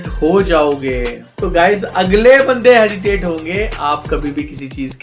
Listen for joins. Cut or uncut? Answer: cut